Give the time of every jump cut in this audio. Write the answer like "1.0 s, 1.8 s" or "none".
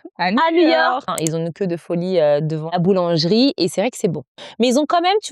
1.1 s, 2.7 s, 4.4 s